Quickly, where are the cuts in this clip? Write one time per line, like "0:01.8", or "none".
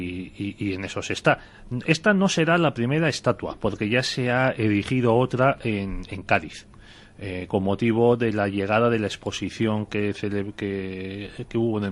0:06.0